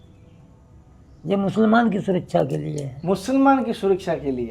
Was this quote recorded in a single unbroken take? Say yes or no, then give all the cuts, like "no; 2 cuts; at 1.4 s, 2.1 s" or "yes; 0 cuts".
yes; 0 cuts